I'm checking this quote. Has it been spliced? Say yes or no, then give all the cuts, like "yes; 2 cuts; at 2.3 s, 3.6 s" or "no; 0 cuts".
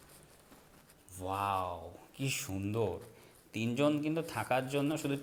no; 0 cuts